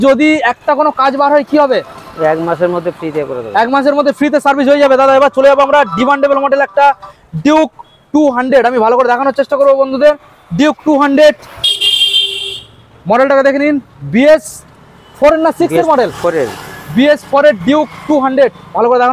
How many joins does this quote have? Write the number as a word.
zero